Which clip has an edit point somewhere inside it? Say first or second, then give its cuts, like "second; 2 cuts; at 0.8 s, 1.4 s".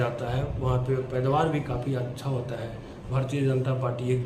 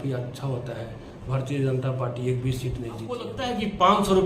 second; 1 cut; at 3.4 s